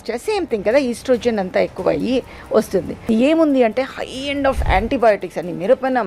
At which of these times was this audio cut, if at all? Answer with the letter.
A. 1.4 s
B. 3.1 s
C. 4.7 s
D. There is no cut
B